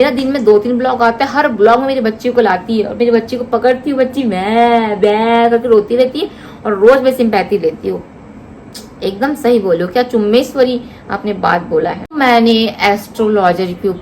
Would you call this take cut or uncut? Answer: cut